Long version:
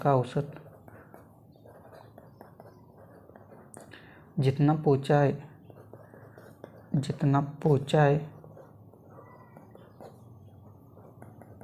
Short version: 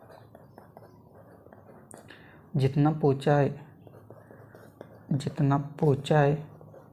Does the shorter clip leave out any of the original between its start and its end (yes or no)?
no